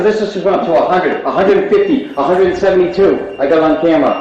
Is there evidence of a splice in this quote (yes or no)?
no